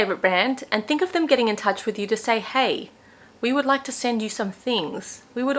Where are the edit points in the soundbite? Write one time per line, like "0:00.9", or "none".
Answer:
none